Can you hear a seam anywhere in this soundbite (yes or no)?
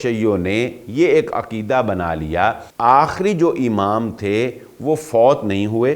yes